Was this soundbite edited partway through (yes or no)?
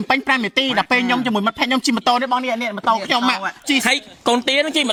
no